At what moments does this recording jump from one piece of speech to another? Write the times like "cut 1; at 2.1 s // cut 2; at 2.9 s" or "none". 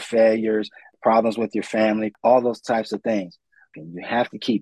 cut 1; at 2.1 s // cut 2; at 3.7 s